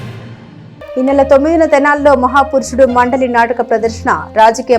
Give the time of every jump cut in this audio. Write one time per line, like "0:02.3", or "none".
none